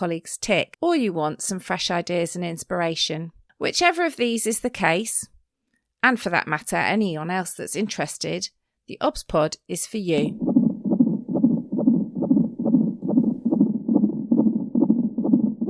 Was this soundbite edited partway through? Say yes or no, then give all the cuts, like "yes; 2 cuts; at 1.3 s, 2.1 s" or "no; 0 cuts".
yes; 1 cut; at 10.3 s